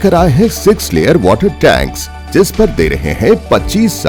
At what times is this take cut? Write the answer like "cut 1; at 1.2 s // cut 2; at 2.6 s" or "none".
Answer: none

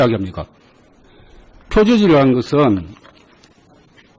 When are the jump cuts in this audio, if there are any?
cut 1; at 2.1 s

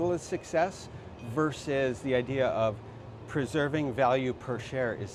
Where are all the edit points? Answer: none

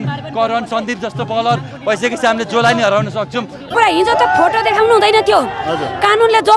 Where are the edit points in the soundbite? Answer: cut 1; at 3.7 s

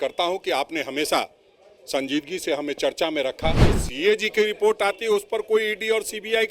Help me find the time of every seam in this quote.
cut 1; at 3.8 s

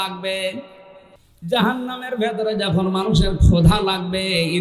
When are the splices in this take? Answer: cut 1; at 1.5 s

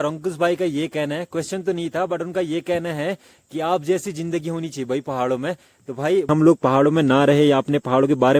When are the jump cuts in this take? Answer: cut 1; at 6.3 s

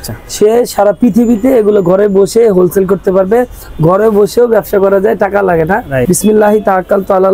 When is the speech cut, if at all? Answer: cut 1; at 6.0 s

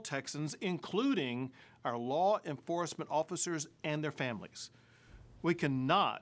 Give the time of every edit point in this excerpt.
cut 1; at 4.9 s

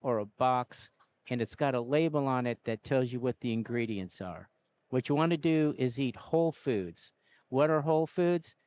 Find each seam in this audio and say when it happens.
none

